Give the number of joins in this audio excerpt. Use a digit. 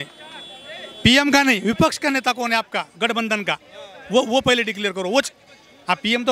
0